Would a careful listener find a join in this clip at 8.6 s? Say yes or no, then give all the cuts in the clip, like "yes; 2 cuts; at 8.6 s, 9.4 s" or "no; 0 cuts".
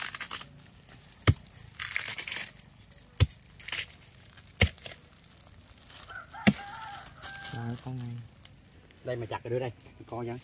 no; 0 cuts